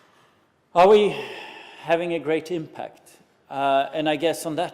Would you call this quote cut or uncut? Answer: cut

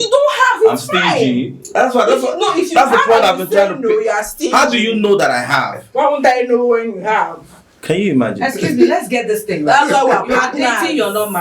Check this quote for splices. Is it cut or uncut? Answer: uncut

